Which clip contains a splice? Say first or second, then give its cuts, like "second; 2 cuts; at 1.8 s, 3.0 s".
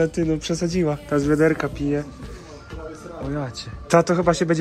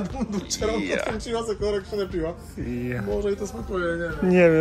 first; 2 cuts; at 1.0 s, 3.7 s